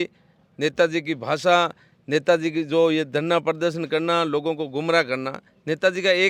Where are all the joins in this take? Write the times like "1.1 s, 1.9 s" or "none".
none